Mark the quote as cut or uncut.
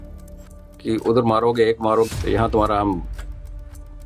cut